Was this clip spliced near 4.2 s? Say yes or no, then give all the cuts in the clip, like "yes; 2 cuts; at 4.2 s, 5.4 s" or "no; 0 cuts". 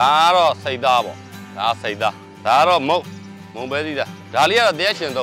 yes; 2 cuts; at 2.3 s, 4.2 s